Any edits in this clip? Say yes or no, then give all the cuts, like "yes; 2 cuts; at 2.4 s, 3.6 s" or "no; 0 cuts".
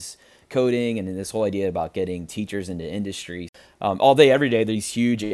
yes; 1 cut; at 3.5 s